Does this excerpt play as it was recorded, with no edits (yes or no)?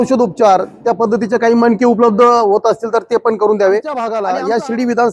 no